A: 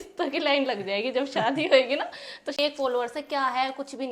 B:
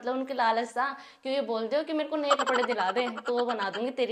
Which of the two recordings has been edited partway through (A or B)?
A